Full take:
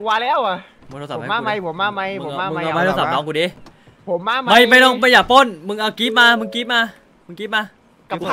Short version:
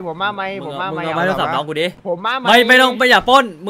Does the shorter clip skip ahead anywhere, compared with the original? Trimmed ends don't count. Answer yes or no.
yes